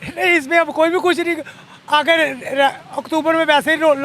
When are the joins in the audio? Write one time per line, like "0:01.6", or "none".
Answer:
none